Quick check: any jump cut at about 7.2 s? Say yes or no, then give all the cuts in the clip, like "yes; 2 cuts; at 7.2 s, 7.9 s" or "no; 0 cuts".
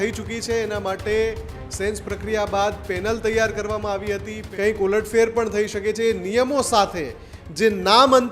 no; 1 cut; at 4.4 s